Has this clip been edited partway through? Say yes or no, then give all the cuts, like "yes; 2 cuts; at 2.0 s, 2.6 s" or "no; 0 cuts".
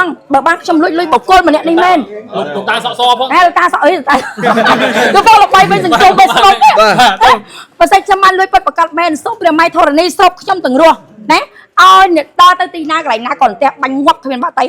no; 0 cuts